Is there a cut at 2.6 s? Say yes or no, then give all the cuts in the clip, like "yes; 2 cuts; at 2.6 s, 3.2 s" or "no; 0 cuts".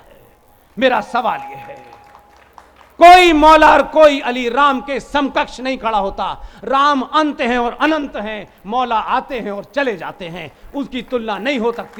no; 0 cuts